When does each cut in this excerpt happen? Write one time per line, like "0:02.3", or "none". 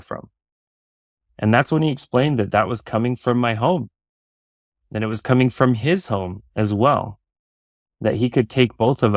none